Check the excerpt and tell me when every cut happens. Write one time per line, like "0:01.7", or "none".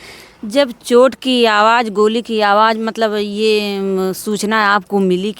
none